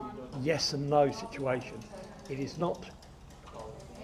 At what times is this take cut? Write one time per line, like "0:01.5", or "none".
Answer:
none